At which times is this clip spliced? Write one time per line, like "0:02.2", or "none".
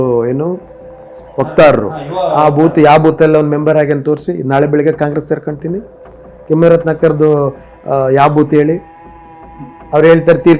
none